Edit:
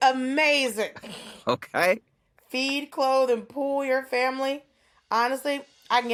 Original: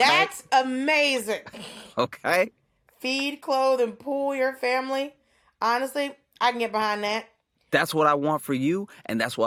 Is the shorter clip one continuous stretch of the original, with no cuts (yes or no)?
yes